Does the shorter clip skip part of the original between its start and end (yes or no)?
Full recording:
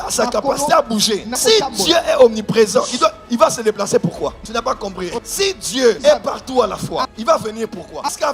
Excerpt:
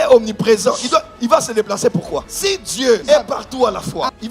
yes